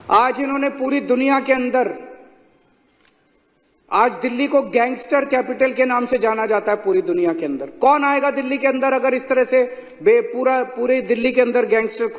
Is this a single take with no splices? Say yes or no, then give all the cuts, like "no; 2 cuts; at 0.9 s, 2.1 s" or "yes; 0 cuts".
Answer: yes; 0 cuts